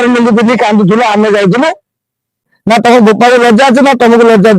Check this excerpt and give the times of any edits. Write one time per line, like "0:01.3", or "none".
0:02.5